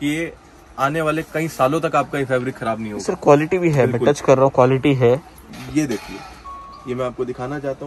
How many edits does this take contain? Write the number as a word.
one